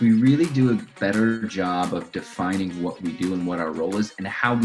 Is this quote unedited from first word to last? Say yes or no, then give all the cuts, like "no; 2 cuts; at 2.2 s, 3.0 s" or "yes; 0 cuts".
no; 1 cut; at 0.9 s